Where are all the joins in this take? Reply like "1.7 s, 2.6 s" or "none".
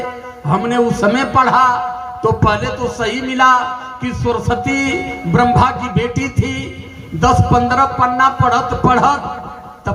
none